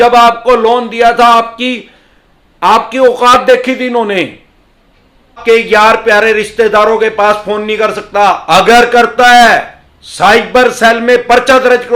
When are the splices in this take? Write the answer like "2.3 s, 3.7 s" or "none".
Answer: 5.4 s